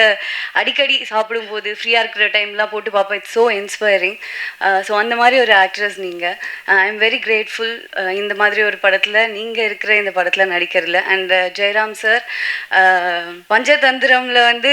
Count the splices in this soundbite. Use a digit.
1